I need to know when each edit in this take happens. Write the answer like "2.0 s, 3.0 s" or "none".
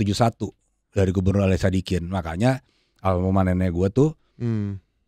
none